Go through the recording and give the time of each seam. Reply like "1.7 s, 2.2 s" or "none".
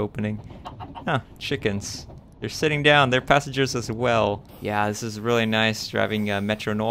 4.5 s